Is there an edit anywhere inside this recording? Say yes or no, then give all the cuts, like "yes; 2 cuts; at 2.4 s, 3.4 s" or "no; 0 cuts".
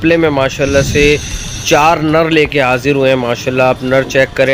no; 0 cuts